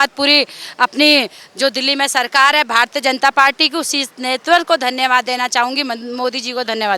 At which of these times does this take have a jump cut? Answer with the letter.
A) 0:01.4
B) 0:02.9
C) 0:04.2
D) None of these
D